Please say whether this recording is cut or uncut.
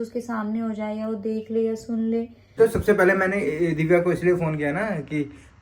cut